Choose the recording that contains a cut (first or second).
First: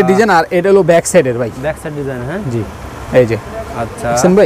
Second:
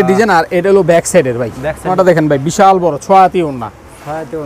second